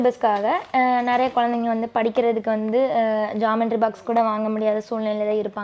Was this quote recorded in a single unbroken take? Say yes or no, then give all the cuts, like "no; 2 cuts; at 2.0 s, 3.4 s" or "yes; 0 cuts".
yes; 0 cuts